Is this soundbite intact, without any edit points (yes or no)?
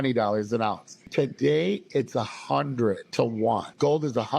no